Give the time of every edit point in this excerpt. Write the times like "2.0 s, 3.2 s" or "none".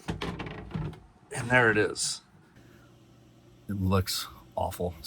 2.6 s